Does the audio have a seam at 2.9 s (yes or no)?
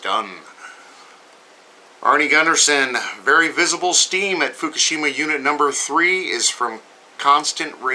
no